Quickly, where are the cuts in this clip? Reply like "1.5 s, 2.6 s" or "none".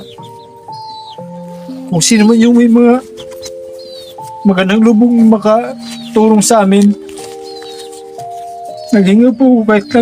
7.1 s, 8.9 s

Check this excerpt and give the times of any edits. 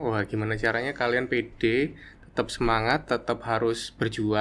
none

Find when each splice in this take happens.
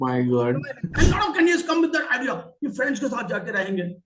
0.9 s

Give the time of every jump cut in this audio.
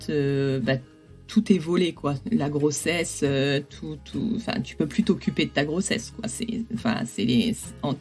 1.2 s

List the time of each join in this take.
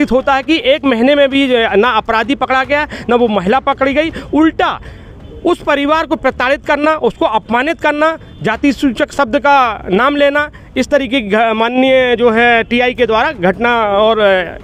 none

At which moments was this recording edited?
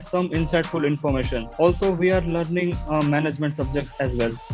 1.4 s

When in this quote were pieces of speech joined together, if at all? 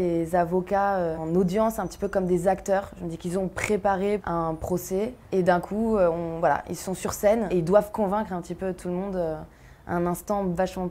1.2 s, 4.2 s, 5.2 s

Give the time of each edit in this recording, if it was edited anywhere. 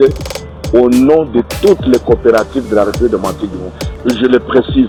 none

